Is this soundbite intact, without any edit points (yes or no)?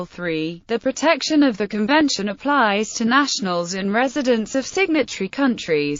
no